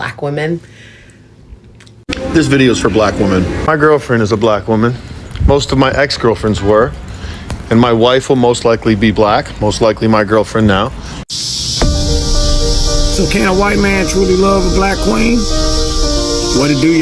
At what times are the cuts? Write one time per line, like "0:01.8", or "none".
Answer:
0:01.9
0:11.2